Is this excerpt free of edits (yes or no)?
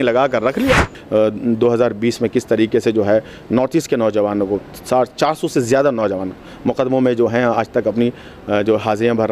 no